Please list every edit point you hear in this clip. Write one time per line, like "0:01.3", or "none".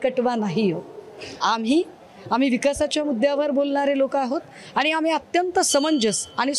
none